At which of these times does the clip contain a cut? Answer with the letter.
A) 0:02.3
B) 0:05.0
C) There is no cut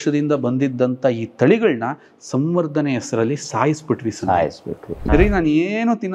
B